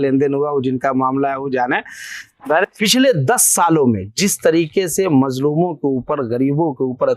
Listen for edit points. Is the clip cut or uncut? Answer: cut